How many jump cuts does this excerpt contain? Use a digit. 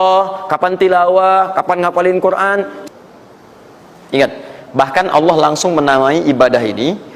1